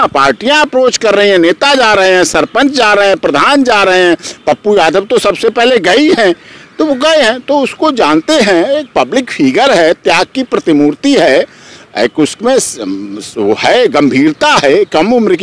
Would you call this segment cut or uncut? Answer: uncut